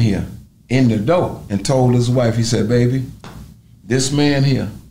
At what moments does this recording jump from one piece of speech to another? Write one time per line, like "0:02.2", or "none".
0:01.4